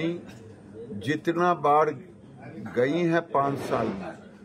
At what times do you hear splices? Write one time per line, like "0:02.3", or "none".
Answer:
none